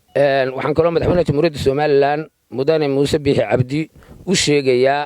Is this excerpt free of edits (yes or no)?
yes